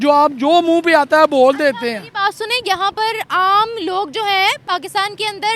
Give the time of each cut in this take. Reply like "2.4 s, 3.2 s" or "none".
none